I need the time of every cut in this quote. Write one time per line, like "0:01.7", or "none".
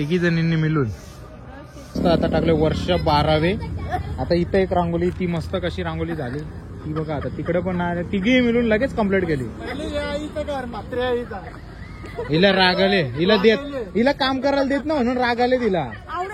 0:02.0